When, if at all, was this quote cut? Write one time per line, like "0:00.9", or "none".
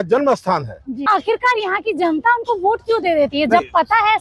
0:01.0